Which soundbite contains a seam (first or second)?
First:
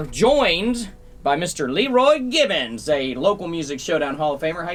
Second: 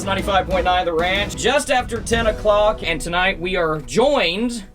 second